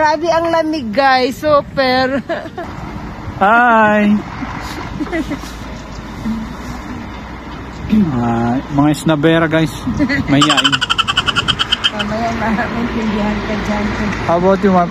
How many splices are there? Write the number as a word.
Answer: one